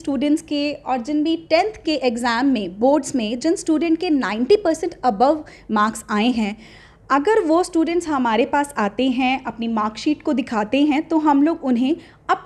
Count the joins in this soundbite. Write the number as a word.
zero